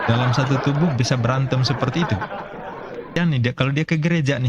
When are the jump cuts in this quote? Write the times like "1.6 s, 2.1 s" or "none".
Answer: 3.4 s